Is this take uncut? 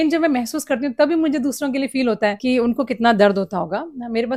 yes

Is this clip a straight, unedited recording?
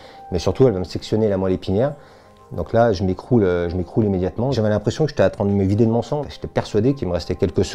no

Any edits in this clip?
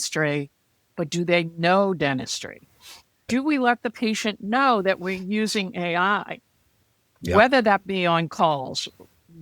yes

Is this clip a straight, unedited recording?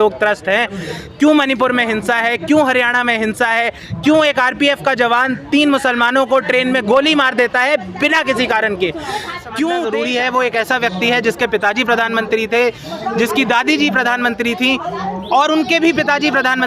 no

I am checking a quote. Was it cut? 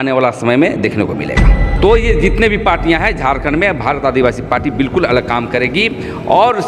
yes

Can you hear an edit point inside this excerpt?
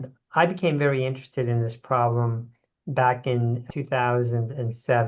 yes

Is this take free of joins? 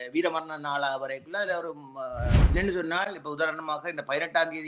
no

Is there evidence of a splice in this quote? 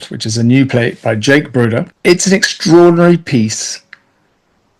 yes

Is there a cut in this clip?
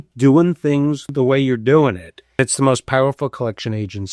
yes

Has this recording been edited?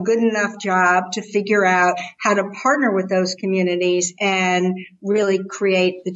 no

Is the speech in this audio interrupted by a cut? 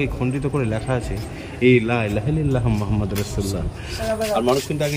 yes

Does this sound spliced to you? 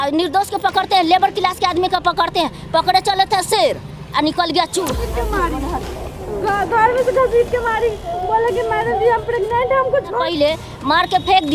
yes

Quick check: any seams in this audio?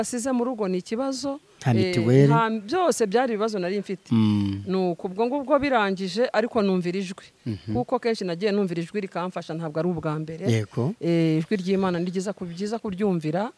no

